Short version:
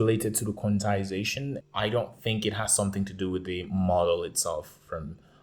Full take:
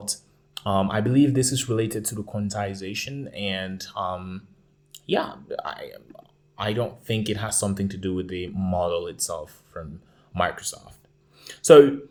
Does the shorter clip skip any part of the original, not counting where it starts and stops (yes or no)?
yes